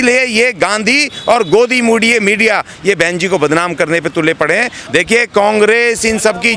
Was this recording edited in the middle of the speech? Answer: yes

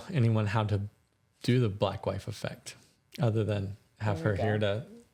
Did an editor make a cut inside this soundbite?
no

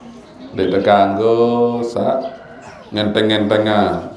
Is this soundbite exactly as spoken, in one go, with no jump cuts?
yes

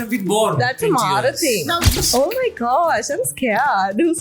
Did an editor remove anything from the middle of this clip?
yes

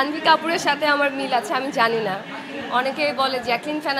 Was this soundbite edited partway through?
no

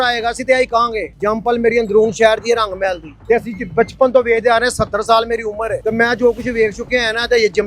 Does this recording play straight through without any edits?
no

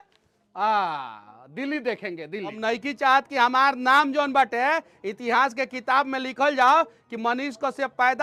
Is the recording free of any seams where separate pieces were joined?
yes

